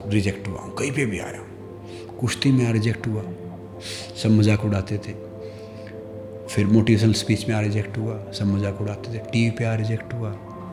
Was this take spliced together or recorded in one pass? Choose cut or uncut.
uncut